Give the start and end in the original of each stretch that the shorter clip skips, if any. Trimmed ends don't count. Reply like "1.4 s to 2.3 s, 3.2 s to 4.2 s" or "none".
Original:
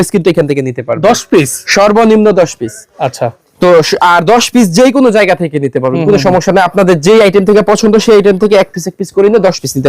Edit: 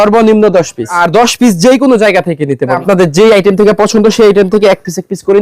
2.8 s to 4.1 s, 5.9 s to 6.7 s